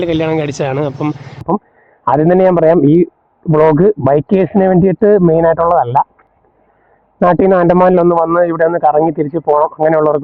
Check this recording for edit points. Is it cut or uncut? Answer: cut